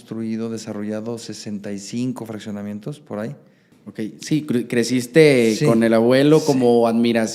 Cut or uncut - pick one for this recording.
cut